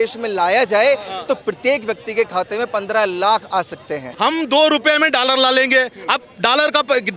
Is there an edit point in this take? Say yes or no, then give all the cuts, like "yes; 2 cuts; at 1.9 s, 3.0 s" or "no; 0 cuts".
yes; 1 cut; at 4.1 s